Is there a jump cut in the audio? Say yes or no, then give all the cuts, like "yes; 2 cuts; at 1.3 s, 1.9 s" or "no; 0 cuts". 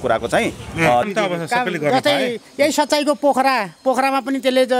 yes; 1 cut; at 1.0 s